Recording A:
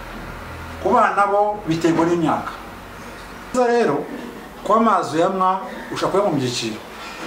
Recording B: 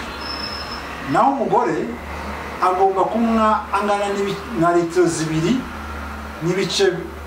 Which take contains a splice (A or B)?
A